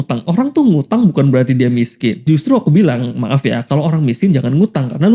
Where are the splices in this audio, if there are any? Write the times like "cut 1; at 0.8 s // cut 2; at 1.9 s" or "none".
none